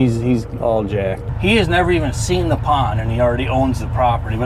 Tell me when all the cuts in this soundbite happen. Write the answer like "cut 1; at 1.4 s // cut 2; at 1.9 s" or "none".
cut 1; at 1.3 s